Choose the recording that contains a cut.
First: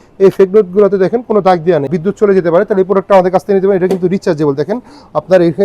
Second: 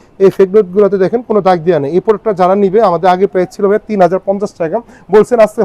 first; 1 cut; at 1.9 s

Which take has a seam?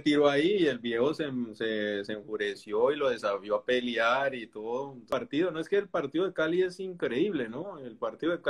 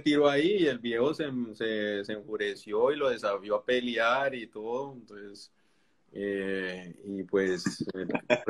first; 1 cut; at 5.1 s

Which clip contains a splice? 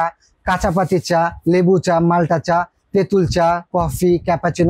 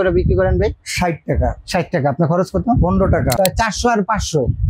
second; 1 cut; at 3.3 s

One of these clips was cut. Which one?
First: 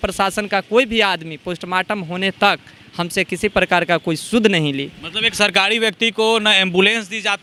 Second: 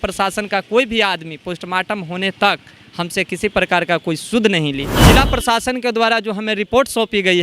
second; 1 cut; at 5.1 s

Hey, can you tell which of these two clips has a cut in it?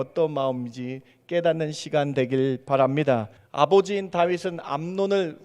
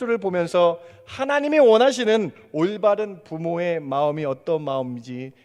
first; 1 cut; at 3.4 s

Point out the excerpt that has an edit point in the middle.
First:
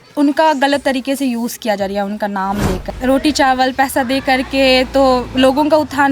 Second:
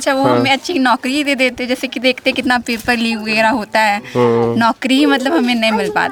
first; 1 cut; at 2.9 s

